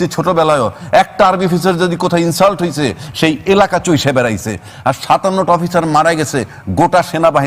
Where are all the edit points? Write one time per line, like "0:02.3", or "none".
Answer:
none